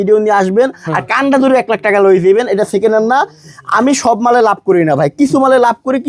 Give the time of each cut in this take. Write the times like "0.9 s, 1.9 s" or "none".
none